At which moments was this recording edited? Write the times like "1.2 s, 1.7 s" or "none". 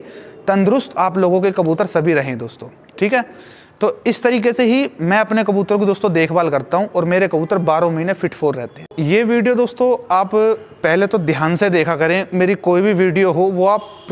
8.9 s

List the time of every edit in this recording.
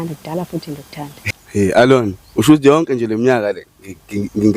1.3 s

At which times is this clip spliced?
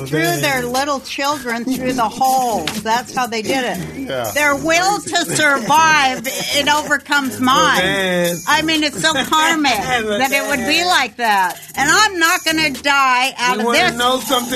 11.6 s

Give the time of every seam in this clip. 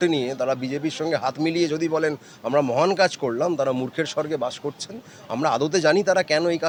none

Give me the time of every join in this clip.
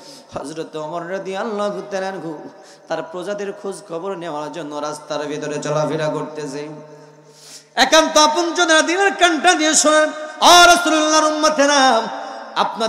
none

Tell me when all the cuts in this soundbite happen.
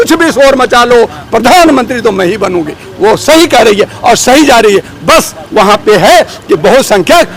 none

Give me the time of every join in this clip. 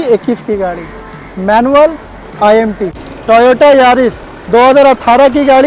3.1 s

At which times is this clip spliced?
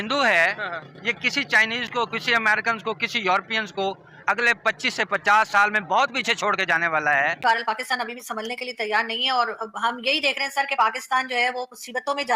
7.4 s

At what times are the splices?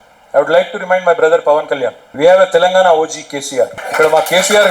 2.0 s, 3.8 s

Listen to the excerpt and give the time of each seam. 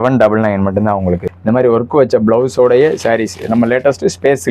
1.3 s

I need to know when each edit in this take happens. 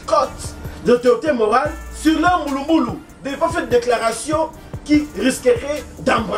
none

